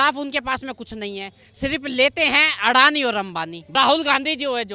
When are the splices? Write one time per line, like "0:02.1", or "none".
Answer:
0:03.6